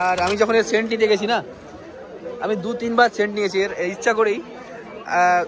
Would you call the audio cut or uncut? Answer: uncut